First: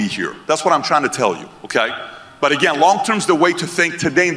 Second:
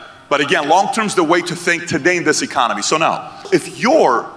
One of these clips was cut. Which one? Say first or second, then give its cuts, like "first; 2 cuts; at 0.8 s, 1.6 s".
second; 1 cut; at 3.3 s